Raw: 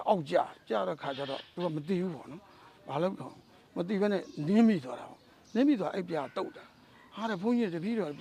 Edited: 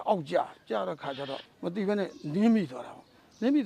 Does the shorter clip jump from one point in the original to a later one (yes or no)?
yes